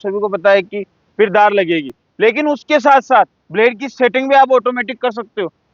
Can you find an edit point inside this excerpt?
no; 0 cuts

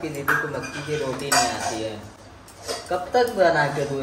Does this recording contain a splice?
no; 0 cuts

